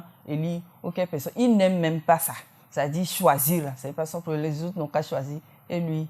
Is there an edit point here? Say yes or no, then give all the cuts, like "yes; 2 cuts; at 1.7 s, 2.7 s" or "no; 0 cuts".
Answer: no; 0 cuts